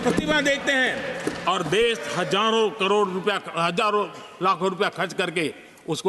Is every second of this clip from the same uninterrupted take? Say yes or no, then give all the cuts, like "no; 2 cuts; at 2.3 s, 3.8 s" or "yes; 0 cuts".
yes; 0 cuts